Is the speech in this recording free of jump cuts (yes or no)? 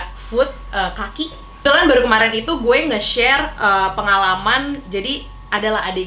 no